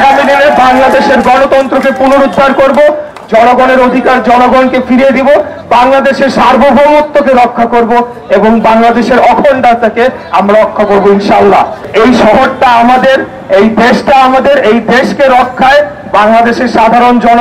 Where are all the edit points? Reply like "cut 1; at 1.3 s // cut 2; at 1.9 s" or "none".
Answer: cut 1; at 11.9 s